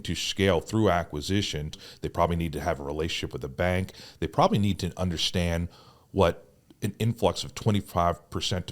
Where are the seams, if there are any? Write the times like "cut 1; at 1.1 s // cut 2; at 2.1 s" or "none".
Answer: cut 1; at 1.9 s